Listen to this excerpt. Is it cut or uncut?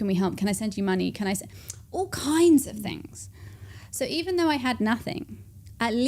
uncut